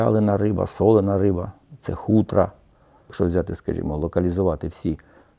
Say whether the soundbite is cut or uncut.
cut